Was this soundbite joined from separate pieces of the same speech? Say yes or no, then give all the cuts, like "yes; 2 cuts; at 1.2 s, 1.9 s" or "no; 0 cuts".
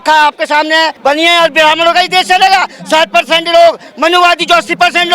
yes; 1 cut; at 0.9 s